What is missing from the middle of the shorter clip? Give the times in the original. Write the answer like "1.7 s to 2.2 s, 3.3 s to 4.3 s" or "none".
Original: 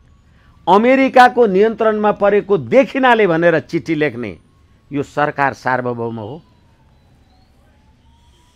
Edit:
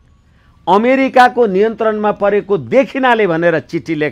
none